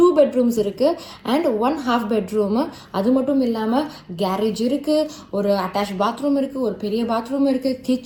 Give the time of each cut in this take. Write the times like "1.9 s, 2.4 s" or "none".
none